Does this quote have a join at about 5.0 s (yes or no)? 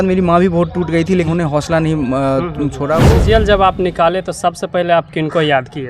no